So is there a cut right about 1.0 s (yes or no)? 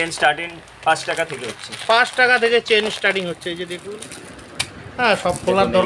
no